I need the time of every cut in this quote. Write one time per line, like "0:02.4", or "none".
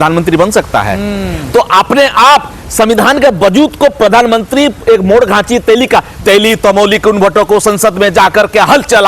none